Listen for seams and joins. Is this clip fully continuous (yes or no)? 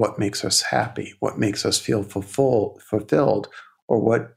yes